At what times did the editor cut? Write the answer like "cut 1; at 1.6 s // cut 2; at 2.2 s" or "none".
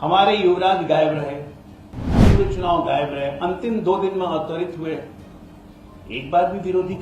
cut 1; at 2.1 s